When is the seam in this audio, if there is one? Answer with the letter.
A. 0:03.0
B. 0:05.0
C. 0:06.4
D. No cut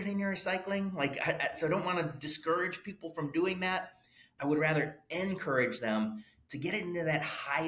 D